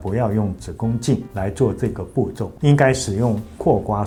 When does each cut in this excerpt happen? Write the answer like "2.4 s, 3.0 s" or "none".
none